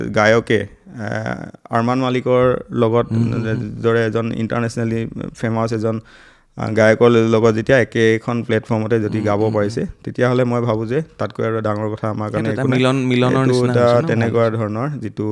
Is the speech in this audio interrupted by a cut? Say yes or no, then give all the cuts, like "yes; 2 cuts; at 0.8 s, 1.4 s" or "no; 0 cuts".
no; 0 cuts